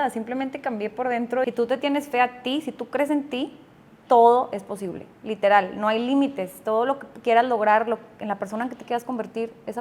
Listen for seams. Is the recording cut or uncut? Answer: cut